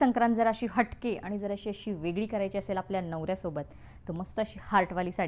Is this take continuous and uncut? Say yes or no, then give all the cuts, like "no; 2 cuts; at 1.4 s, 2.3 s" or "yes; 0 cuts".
yes; 0 cuts